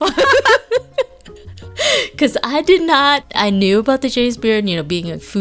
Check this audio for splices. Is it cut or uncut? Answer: cut